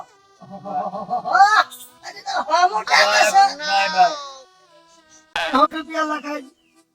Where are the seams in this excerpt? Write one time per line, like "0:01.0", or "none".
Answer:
0:05.4